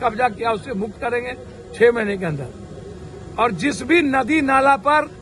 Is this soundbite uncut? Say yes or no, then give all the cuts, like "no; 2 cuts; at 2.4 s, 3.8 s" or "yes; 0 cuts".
yes; 0 cuts